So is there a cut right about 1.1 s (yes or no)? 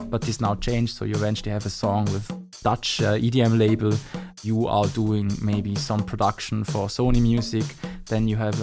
no